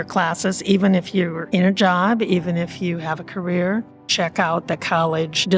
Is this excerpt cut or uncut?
cut